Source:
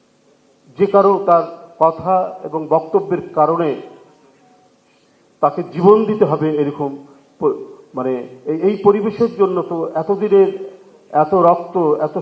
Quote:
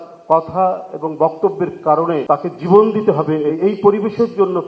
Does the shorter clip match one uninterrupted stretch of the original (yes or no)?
no